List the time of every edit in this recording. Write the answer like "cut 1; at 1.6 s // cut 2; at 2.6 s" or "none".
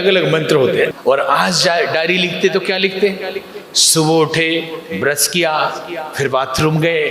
cut 1; at 0.9 s